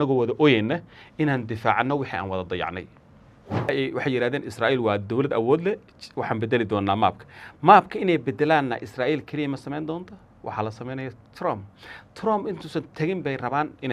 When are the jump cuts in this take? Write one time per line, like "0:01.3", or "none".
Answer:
0:03.7